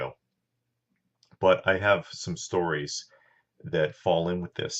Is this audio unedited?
no; 1 cut; at 2.4 s

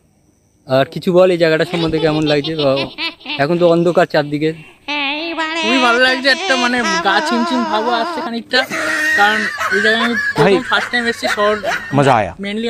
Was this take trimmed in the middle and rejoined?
no; 0 cuts

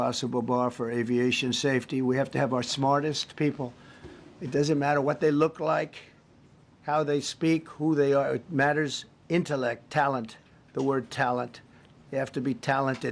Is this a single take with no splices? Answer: yes; 0 cuts

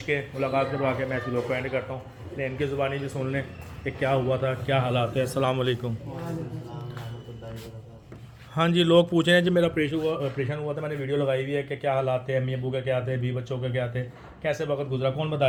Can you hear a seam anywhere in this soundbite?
no; 0 cuts

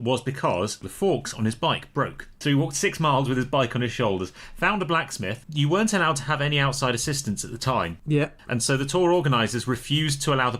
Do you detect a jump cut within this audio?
yes; 2 cuts; at 0.8 s, 2.2 s

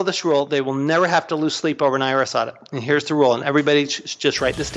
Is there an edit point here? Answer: no; 0 cuts

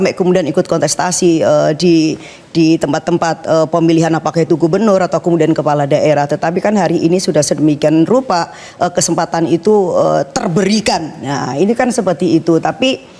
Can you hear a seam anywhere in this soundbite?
no; 0 cuts

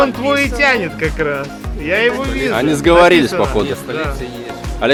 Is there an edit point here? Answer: no; 0 cuts

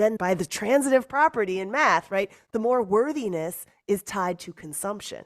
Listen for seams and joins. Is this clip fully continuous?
yes; 0 cuts

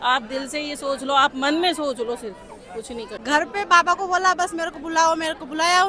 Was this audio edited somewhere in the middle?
yes; 1 cut; at 3.1 s

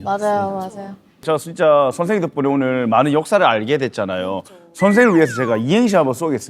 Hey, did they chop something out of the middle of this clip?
yes; 1 cut; at 1.3 s

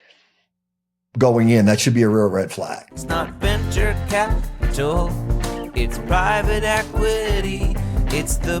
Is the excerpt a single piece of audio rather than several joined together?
no; 1 cut; at 2.9 s

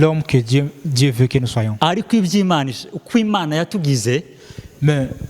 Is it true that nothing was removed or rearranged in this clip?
yes; 0 cuts

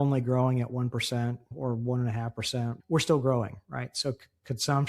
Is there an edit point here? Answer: yes; 2 cuts; at 1.5 s, 2.8 s

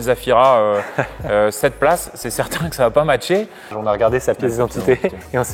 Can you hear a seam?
yes; 1 cut; at 3.8 s

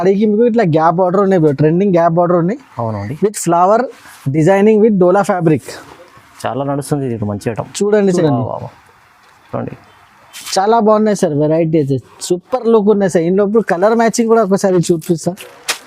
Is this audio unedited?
no; 1 cut; at 8.2 s

